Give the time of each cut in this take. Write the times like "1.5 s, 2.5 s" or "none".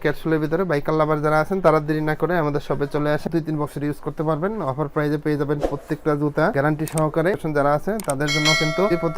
3.2 s, 7.4 s